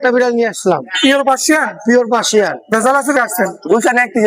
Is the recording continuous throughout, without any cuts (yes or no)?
no